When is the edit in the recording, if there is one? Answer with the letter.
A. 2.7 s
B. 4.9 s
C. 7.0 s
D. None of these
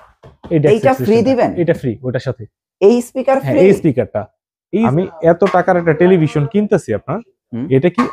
B